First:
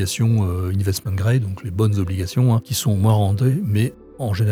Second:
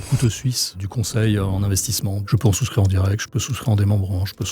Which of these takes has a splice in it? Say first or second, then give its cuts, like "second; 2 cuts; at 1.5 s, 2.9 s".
second; 1 cut; at 2.3 s